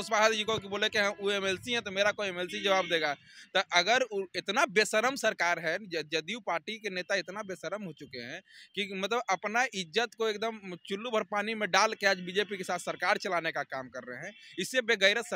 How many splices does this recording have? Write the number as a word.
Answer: zero